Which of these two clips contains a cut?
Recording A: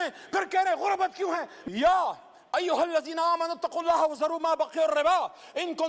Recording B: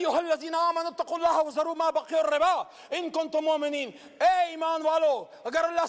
A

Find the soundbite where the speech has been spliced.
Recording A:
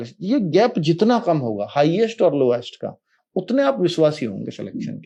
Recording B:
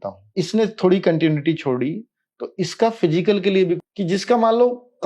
B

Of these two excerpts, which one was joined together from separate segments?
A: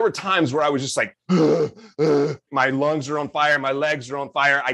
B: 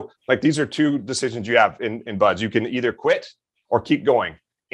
A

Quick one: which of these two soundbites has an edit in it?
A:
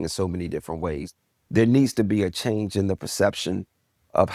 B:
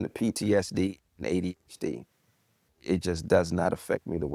A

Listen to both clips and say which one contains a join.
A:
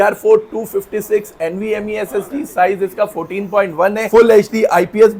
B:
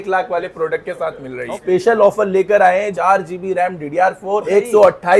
B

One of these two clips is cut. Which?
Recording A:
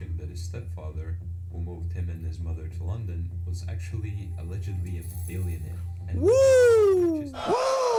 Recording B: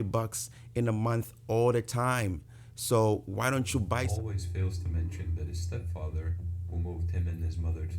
B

